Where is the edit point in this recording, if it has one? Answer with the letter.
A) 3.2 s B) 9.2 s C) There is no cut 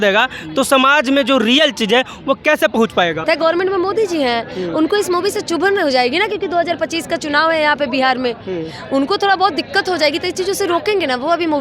A